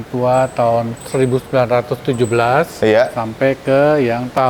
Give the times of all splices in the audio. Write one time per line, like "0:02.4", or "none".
0:01.0